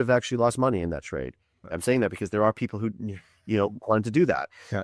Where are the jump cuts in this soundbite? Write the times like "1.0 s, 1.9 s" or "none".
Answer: 1.7 s